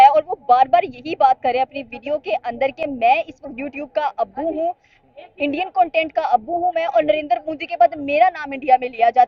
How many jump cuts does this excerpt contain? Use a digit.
0